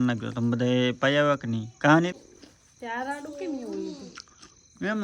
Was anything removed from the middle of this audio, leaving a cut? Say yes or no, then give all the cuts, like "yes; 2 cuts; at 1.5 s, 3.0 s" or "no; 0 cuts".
yes; 1 cut; at 2.3 s